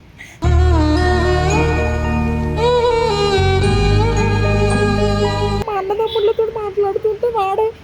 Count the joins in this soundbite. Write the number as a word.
one